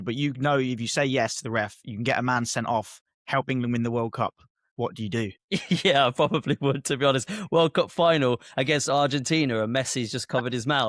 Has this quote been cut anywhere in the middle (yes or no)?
yes